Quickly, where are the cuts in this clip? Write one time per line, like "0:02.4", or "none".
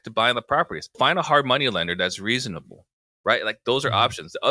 0:00.9